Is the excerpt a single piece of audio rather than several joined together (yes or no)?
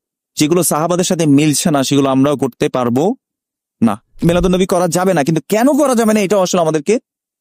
no